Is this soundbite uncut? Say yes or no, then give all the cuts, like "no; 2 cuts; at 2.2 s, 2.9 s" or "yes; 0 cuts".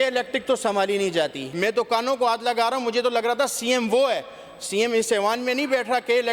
no; 1 cut; at 1.4 s